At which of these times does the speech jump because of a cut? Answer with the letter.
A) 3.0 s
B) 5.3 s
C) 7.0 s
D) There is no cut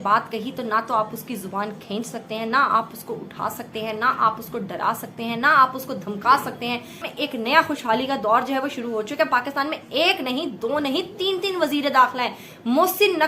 C